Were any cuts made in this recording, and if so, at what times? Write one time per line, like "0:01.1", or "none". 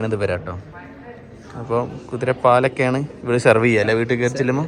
none